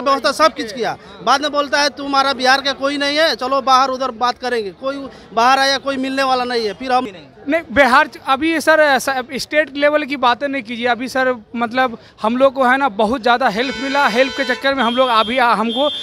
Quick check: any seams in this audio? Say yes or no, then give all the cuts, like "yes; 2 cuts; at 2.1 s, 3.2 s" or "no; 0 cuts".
yes; 1 cut; at 7.1 s